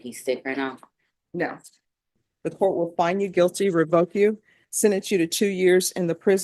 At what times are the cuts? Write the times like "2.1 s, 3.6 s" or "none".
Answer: 2.3 s

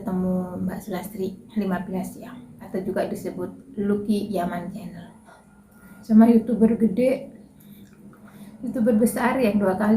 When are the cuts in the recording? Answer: 2.5 s, 6.0 s

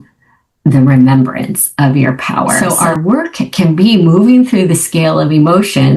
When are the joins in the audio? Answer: 2.6 s

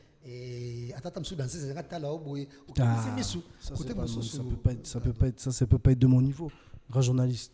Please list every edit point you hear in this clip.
none

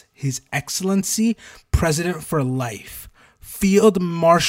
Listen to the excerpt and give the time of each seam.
none

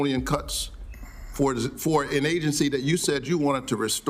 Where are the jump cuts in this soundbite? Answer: none

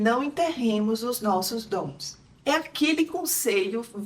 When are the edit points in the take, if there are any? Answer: 2.3 s

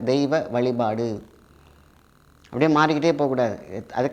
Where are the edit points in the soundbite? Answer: none

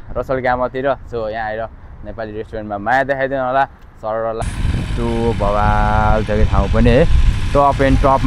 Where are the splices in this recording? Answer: 4.4 s

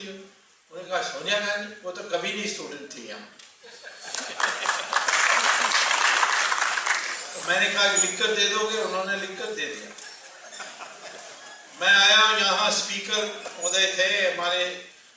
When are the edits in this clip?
8.5 s

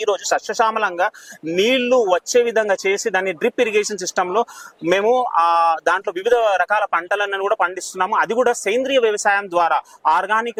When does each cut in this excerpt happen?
none

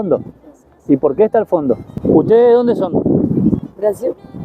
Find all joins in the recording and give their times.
1.9 s

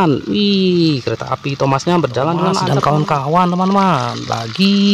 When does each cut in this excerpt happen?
2.6 s

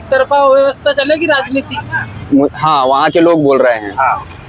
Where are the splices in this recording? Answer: 2.1 s

